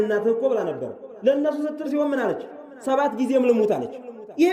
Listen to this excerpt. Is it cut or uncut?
uncut